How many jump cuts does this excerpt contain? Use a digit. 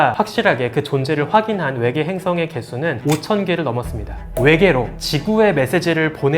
1